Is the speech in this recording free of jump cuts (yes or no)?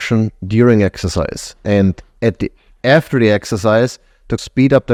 yes